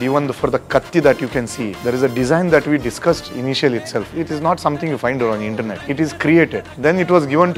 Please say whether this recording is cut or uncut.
cut